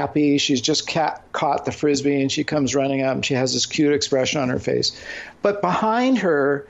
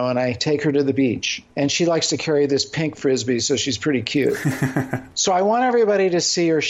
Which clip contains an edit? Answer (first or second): second